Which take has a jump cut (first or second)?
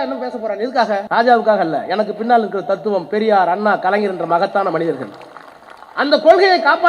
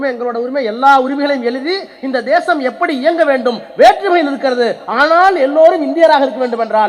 first